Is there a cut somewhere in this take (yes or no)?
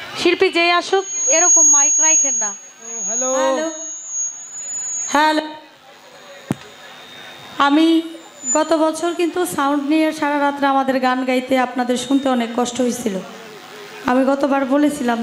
yes